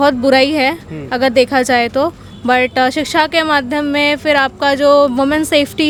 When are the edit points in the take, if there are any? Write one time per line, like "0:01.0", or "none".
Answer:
none